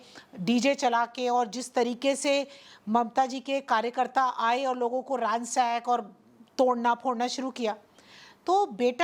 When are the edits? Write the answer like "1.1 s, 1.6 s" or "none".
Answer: none